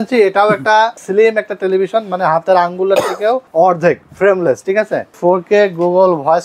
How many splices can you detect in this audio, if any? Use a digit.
3